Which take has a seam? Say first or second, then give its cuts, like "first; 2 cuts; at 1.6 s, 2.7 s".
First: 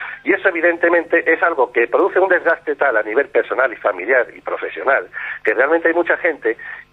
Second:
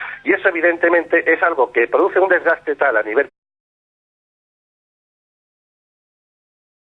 first; 1 cut; at 3.3 s